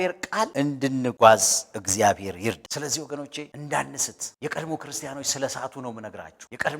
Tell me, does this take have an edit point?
yes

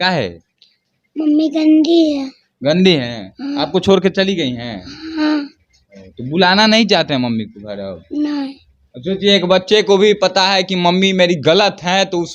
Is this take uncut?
yes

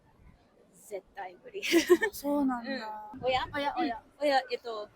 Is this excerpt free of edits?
no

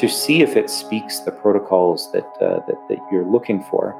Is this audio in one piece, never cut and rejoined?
no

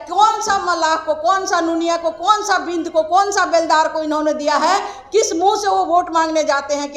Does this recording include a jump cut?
no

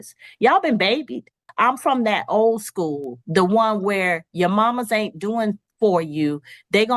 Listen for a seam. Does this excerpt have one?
yes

